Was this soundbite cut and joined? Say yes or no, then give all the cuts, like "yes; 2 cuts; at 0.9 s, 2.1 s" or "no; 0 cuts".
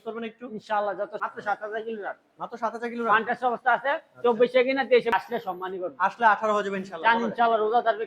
yes; 2 cuts; at 1.2 s, 5.1 s